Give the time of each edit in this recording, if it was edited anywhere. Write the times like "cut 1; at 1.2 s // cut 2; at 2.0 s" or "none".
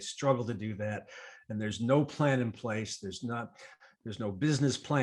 none